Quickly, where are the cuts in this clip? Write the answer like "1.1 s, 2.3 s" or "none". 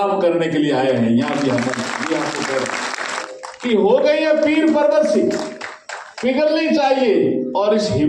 3.3 s